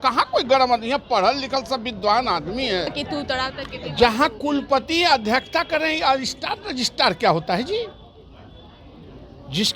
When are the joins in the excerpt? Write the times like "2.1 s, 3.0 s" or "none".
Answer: 2.9 s